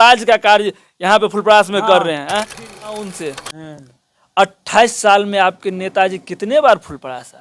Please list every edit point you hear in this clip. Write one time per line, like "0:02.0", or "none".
0:02.9